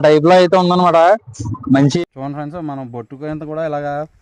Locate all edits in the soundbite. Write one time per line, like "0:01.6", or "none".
0:02.0